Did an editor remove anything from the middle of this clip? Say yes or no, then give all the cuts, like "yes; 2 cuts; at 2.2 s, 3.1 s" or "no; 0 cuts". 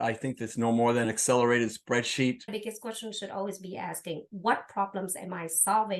yes; 2 cuts; at 1.1 s, 2.5 s